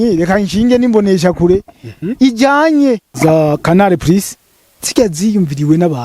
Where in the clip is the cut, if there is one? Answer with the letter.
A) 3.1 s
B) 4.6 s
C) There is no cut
A